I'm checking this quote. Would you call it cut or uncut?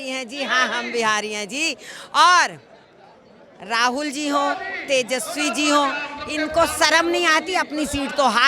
uncut